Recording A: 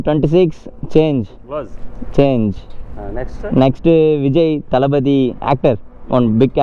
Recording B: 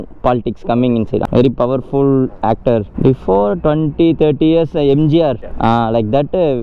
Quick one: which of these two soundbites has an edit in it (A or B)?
B